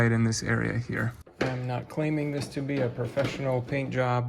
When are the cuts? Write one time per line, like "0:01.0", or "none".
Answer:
0:01.2